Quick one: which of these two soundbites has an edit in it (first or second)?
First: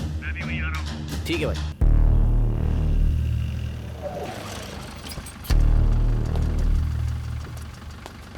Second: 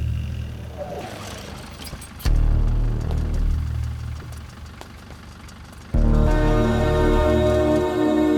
first